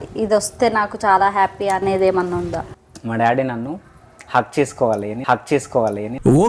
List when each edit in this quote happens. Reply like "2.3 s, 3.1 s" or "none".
2.7 s